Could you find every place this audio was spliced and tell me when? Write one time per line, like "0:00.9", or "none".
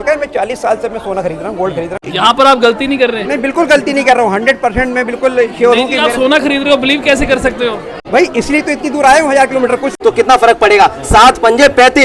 0:02.0
0:07.9
0:09.9